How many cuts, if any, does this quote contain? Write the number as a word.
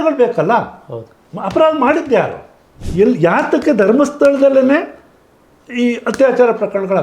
one